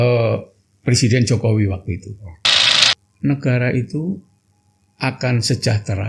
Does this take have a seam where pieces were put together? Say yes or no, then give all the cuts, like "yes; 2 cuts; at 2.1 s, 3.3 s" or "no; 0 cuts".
yes; 1 cut; at 2.7 s